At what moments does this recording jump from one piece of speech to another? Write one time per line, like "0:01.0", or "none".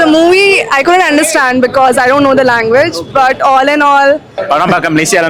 0:04.4